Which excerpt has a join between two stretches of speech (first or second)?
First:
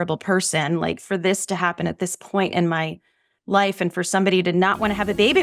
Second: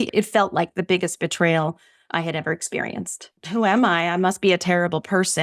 second